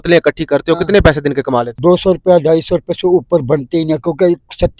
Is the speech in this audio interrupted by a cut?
yes; 1 cut; at 1.7 s

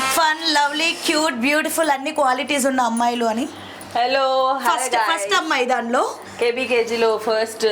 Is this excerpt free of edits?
yes; 0 cuts

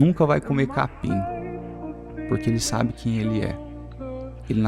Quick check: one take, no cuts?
yes; 0 cuts

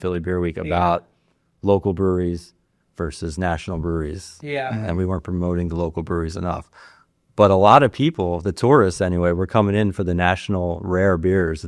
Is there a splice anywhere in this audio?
no; 0 cuts

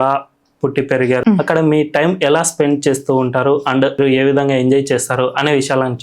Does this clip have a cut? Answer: yes; 2 cuts; at 1.2 s, 4.0 s

